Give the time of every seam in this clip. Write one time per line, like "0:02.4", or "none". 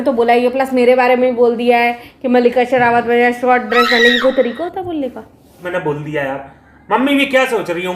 0:05.6